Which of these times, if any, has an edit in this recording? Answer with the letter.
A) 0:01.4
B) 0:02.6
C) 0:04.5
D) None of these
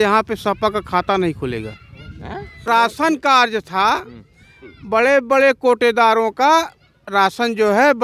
B